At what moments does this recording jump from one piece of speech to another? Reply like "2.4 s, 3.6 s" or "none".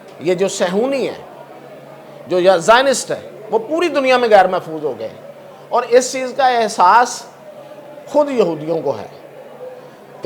none

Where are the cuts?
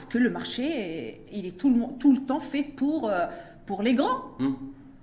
none

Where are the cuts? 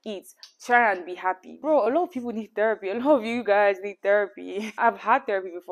1.6 s, 4.7 s

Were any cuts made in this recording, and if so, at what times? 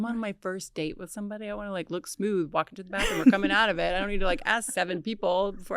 none

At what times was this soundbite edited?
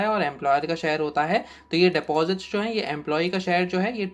none

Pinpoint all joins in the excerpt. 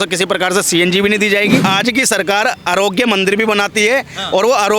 1.6 s

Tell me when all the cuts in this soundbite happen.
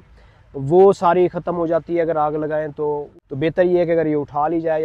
3.2 s

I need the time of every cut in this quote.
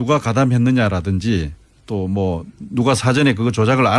none

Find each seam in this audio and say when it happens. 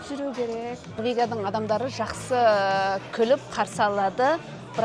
1.0 s

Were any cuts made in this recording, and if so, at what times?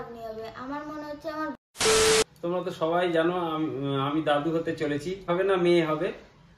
1.5 s, 2.3 s, 5.3 s

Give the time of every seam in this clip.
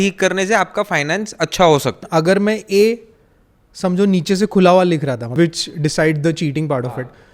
2.0 s, 5.3 s

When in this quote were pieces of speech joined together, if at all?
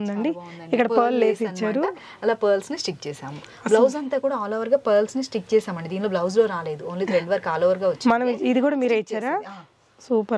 none

